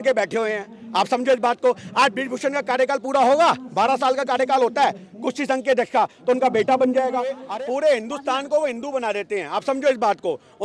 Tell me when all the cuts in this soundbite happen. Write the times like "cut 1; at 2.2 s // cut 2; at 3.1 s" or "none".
cut 1; at 7.4 s